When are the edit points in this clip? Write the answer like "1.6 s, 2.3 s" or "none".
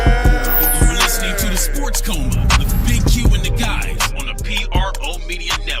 none